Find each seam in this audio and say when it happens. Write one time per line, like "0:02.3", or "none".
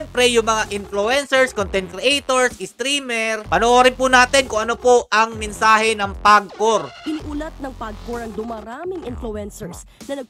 0:03.4
0:06.9